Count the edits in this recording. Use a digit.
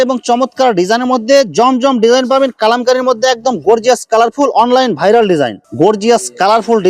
1